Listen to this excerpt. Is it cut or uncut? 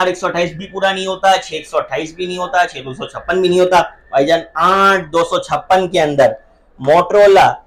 uncut